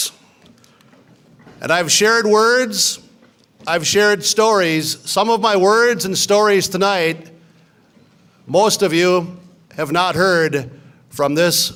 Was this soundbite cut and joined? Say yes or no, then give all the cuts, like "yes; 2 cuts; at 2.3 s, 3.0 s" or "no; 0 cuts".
no; 0 cuts